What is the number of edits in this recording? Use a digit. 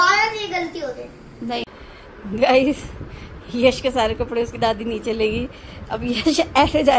1